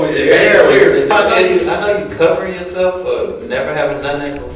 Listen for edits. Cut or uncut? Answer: cut